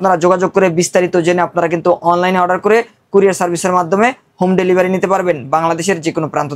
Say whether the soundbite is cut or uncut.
uncut